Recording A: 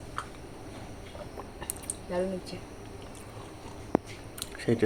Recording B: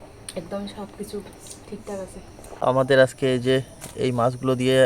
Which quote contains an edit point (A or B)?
B